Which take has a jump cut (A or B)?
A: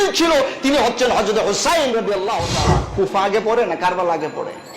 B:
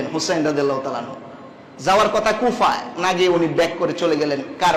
A